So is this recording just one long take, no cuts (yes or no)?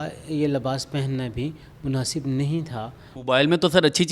no